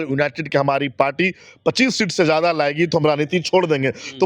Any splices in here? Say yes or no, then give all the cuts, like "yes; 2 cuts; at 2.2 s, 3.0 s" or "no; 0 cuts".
no; 0 cuts